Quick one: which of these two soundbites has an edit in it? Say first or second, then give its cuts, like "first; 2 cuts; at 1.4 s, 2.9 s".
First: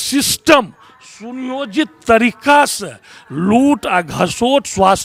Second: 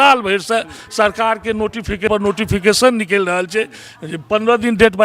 second; 1 cut; at 2.1 s